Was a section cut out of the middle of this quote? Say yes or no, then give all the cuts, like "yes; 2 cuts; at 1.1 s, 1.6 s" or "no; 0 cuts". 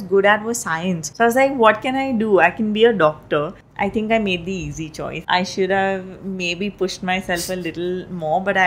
yes; 3 cuts; at 1.0 s, 3.6 s, 5.1 s